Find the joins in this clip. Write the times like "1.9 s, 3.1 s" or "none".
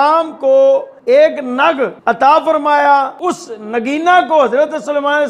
0.9 s, 2.0 s, 3.1 s